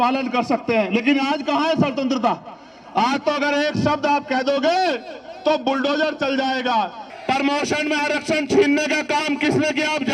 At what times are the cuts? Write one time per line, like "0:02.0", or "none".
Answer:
0:07.0